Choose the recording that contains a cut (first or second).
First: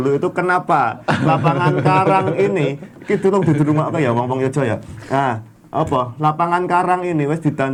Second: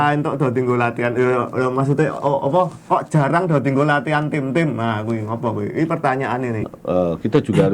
second